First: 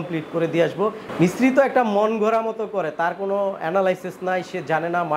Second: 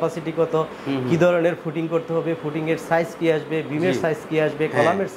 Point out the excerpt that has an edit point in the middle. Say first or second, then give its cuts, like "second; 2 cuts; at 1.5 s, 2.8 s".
first; 1 cut; at 1.0 s